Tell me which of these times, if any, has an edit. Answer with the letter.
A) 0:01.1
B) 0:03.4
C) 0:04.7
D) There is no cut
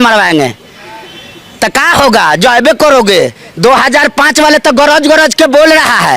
B